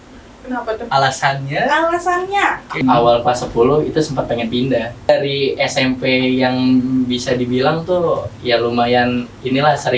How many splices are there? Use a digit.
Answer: 2